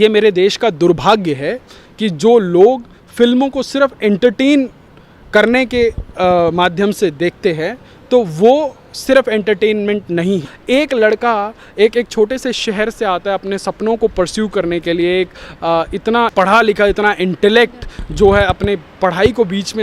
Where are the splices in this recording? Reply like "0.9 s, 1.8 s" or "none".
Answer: 10.5 s